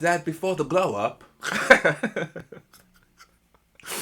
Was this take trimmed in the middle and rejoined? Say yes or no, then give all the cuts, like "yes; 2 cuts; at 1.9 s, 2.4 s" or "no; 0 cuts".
no; 0 cuts